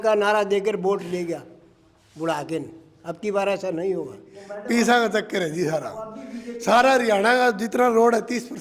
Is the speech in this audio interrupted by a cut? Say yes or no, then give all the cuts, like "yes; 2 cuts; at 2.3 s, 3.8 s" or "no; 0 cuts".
yes; 1 cut; at 4.3 s